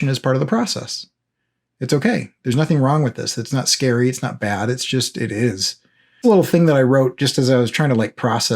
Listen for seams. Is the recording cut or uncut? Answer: cut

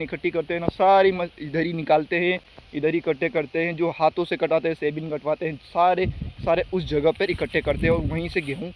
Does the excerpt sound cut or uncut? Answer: uncut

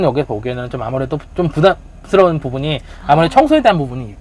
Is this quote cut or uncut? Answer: uncut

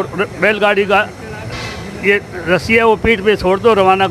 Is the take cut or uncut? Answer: uncut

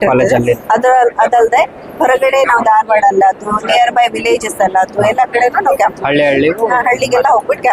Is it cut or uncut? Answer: uncut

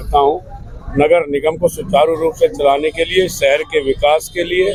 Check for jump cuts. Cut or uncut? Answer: uncut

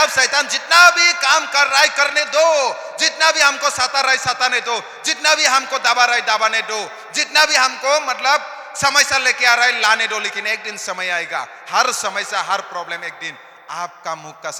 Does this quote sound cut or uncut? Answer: uncut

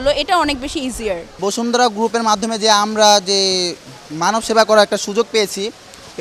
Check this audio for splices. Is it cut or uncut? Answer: uncut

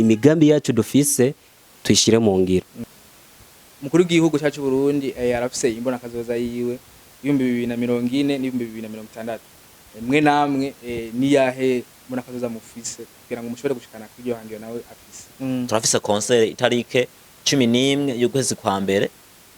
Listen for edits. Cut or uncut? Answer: cut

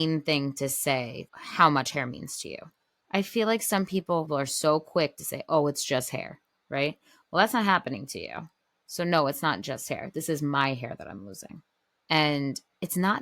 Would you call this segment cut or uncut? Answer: uncut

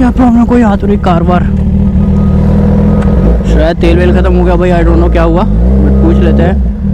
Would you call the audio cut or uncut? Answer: uncut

